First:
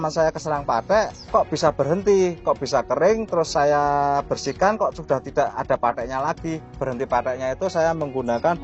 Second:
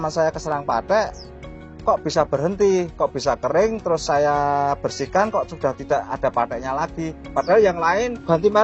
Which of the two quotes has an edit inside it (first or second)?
first